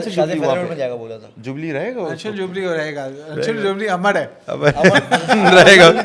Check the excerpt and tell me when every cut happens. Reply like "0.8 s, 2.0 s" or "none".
none

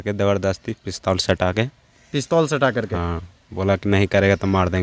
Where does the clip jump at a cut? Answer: none

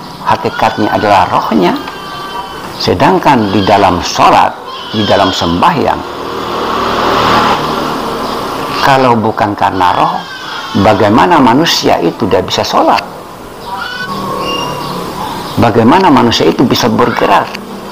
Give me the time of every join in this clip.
7.5 s, 14.0 s

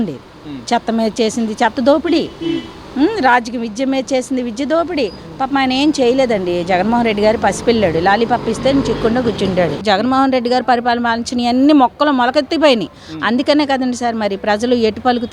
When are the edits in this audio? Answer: 9.8 s

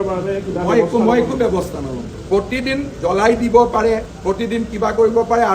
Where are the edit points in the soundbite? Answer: 2.2 s

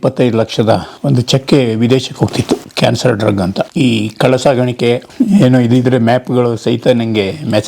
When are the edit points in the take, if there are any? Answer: 3.7 s, 5.1 s

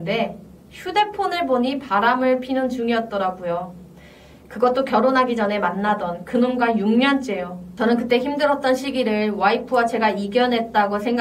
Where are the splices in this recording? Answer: none

